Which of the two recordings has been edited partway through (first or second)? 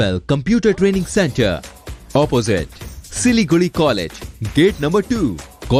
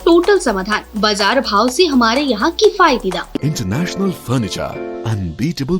second